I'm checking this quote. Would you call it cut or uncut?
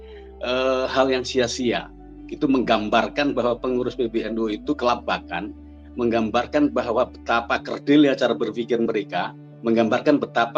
uncut